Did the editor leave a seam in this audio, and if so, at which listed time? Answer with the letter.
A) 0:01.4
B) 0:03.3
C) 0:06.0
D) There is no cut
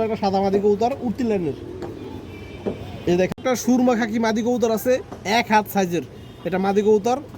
B